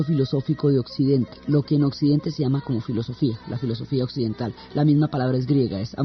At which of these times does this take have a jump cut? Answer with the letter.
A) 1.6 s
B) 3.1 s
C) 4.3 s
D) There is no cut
B